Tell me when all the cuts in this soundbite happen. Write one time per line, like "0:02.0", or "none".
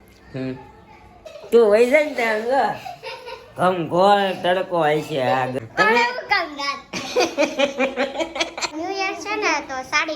0:01.3
0:05.5
0:08.7